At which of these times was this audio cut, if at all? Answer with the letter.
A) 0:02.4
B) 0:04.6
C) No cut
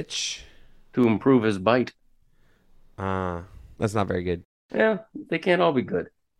B